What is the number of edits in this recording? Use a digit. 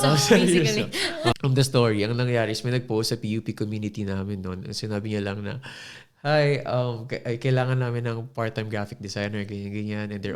0